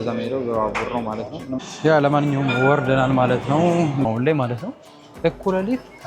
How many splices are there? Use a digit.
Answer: 2